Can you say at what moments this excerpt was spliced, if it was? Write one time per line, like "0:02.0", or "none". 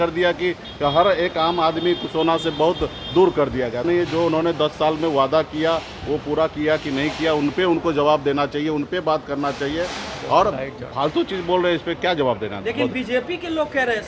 0:03.8